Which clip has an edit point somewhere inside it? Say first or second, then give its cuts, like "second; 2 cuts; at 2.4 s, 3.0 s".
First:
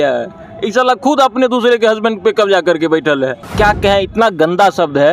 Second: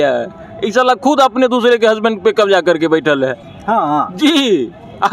first; 1 cut; at 3.4 s